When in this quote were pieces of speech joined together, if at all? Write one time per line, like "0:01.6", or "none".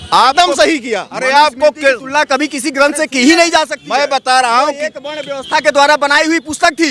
none